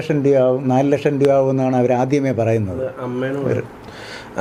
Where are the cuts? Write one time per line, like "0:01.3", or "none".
none